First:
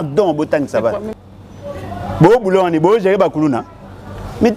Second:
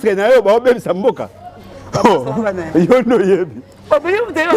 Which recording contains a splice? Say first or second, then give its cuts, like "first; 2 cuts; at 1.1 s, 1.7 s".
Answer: first; 1 cut; at 1.1 s